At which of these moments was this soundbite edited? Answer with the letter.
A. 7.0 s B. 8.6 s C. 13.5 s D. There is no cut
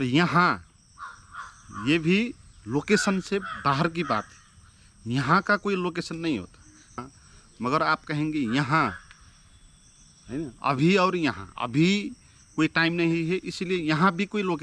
A